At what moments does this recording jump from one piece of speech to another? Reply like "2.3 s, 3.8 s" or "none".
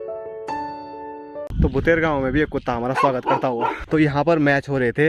1.5 s, 3.8 s